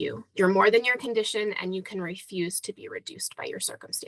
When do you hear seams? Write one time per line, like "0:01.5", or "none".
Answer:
none

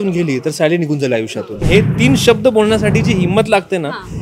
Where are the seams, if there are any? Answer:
0:01.6

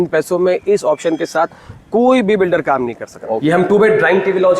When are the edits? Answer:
0:03.3

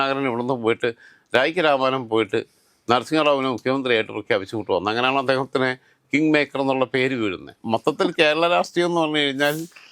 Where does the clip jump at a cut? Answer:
0:07.6

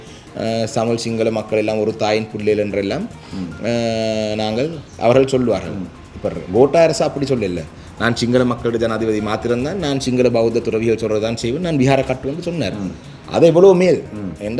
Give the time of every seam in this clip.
none

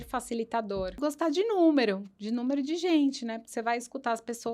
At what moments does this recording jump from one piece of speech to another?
0:00.9

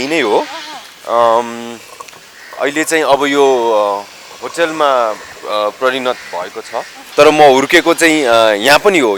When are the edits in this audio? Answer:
0:07.0

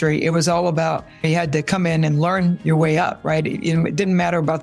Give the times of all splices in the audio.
0:01.2

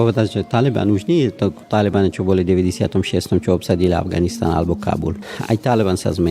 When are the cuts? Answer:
0:05.3

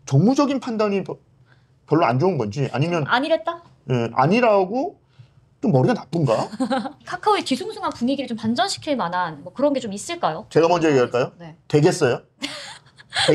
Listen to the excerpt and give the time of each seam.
0:07.0

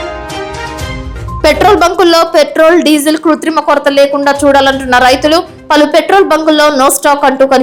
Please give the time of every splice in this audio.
none

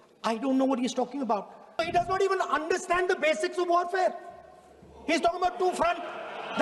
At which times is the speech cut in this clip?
0:01.8

